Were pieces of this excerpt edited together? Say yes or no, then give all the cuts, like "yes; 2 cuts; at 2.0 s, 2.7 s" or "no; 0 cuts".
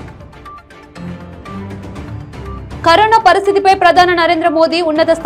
no; 0 cuts